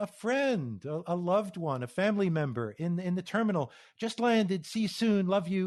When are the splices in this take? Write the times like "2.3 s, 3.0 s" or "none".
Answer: none